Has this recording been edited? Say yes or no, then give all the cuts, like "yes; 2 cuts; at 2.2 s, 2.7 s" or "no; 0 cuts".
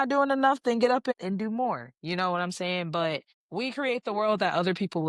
yes; 1 cut; at 3.4 s